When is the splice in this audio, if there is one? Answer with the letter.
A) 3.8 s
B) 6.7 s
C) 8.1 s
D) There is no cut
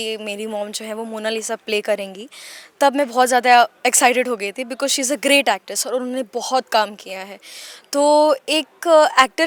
D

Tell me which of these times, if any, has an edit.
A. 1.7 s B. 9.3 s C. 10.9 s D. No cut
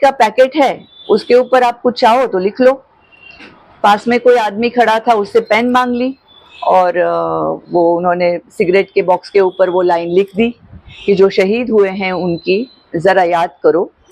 D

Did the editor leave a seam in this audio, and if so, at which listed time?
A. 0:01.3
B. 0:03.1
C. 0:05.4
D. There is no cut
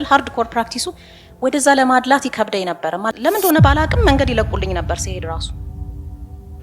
B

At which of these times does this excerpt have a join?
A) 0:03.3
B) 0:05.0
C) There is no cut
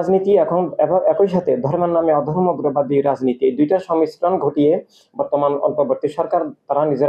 C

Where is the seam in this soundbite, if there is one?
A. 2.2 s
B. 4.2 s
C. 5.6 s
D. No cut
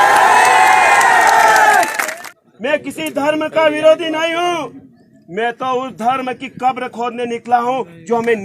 A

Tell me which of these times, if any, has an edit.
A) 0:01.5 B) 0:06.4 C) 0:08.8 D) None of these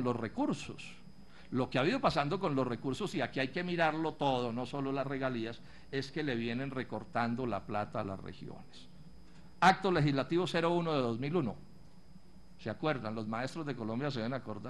D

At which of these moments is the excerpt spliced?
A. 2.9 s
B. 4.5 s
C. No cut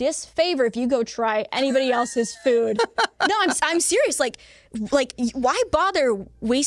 C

